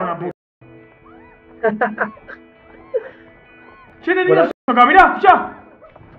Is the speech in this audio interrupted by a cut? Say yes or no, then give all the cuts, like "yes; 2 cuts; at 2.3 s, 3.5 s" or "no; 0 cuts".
no; 0 cuts